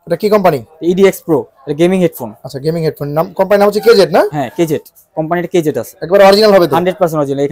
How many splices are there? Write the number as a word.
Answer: zero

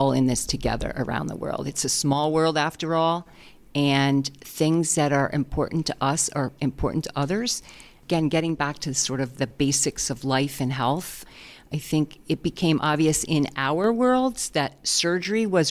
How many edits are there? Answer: zero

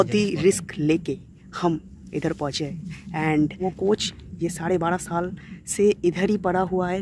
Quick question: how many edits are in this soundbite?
one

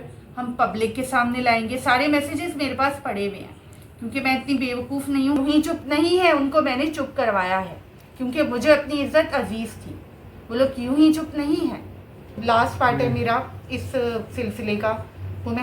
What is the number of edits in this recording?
two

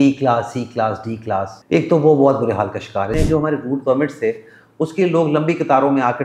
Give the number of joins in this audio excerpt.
two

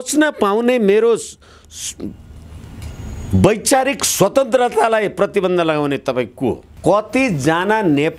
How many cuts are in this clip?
one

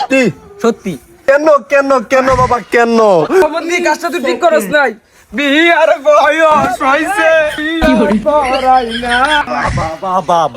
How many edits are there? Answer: four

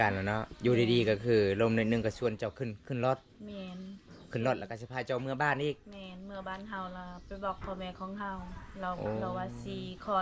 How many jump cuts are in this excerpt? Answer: zero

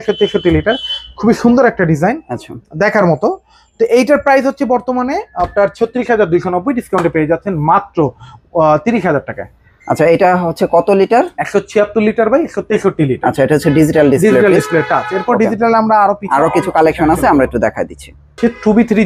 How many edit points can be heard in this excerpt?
zero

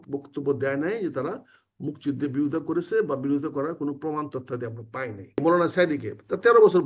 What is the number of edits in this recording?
one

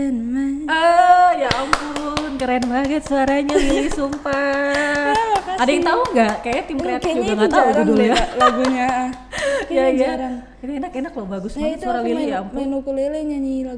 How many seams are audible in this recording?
zero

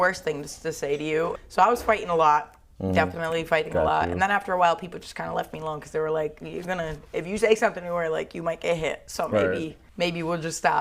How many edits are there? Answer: two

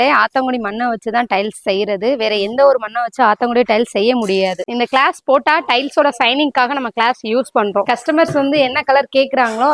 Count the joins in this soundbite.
two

